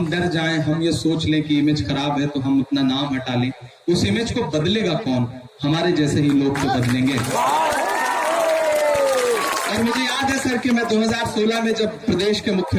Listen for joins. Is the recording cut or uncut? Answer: uncut